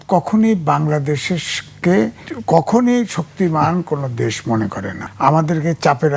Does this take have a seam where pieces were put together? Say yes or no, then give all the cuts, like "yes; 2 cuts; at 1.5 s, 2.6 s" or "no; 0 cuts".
yes; 2 cuts; at 2.3 s, 5.0 s